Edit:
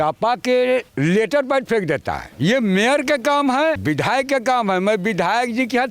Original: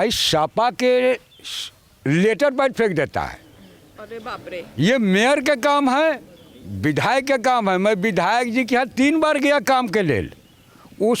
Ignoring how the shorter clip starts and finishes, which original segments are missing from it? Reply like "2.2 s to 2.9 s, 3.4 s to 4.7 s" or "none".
1.2 s to 2.0 s, 3.4 s to 4.7 s, 6.2 s to 6.8 s

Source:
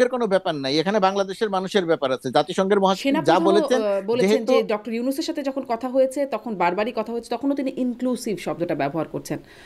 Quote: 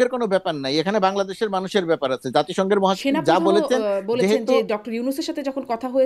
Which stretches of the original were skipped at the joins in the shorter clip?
none

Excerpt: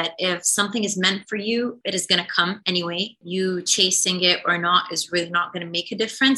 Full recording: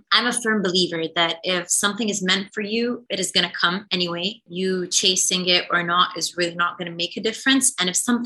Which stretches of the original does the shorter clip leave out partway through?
none

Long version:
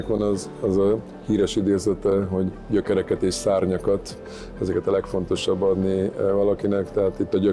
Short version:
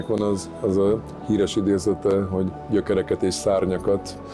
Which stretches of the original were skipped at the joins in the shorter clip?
none

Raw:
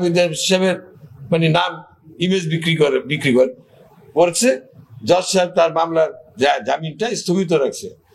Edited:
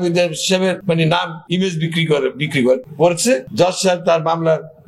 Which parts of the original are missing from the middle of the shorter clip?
1.1 s to 1.8 s, 3.9 s to 4.7 s

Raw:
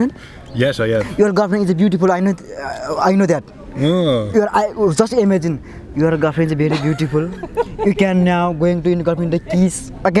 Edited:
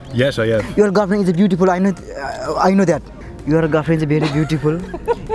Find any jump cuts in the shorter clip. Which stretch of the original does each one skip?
3.6 s to 5.7 s

